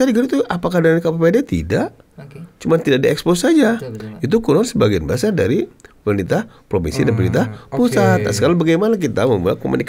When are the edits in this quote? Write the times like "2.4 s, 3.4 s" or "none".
none